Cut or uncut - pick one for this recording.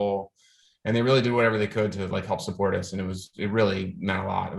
uncut